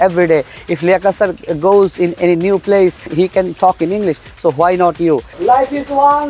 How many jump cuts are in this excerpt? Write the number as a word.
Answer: one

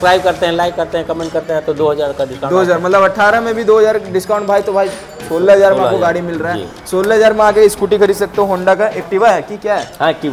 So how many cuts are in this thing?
zero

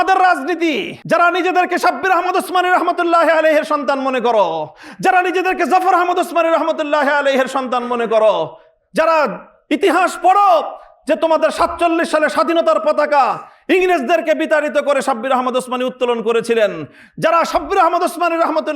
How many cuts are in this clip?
one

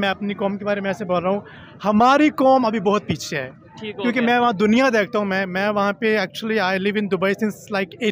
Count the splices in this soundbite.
zero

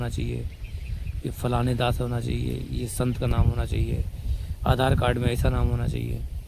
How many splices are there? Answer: zero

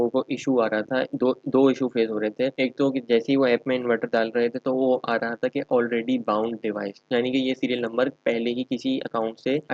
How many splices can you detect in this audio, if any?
zero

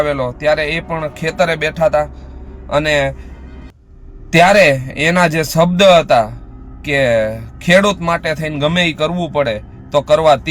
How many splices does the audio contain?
zero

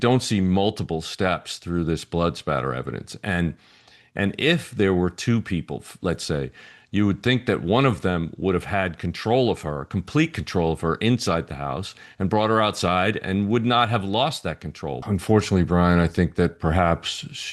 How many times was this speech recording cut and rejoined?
one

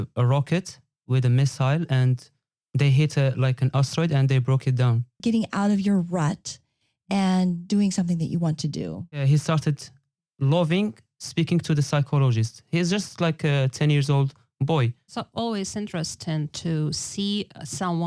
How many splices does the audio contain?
three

